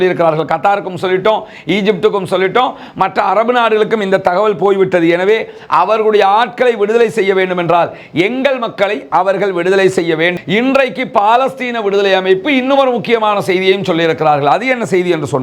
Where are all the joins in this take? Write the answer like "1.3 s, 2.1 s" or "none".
10.3 s